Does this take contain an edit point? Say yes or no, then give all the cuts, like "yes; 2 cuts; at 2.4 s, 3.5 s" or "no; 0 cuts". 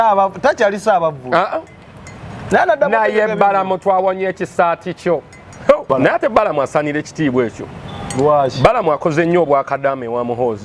yes; 1 cut; at 5.8 s